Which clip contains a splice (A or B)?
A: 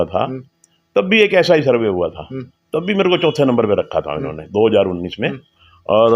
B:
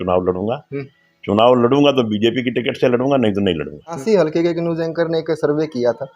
B